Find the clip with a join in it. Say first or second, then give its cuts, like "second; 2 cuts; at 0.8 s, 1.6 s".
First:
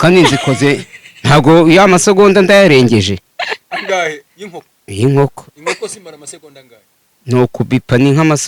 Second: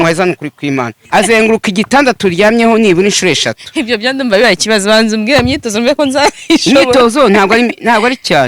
second; 1 cut; at 1.0 s